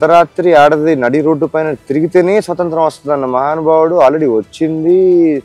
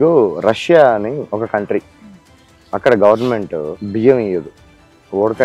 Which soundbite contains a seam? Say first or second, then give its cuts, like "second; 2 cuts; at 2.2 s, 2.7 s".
second; 2 cuts; at 1.2 s, 3.8 s